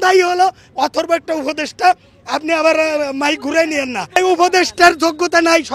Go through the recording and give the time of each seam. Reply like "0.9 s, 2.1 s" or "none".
4.2 s